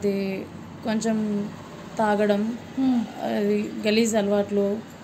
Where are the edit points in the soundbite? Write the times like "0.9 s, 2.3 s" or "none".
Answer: none